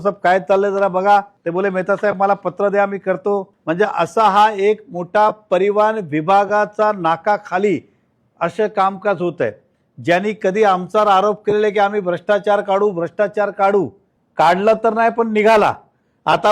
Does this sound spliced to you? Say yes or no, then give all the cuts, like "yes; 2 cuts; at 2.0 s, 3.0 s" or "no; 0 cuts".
yes; 2 cuts; at 1.4 s, 3.5 s